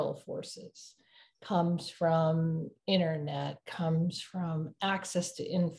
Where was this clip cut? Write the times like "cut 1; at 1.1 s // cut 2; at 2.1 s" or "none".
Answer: none